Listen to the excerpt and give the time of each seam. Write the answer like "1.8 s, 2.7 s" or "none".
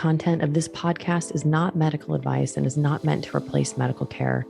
none